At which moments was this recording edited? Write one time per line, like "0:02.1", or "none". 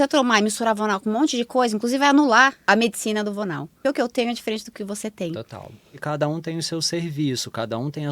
0:02.6
0:03.8
0:05.9